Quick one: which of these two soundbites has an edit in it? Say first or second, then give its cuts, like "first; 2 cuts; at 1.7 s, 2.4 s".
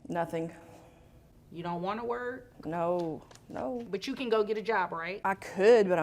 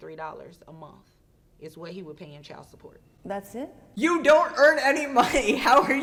first; 2 cuts; at 3.9 s, 5.1 s